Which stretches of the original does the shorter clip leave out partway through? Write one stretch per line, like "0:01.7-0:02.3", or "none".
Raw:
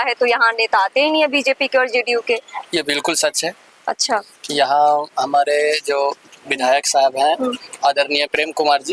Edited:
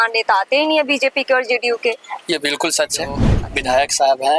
0:03.8-0:06.3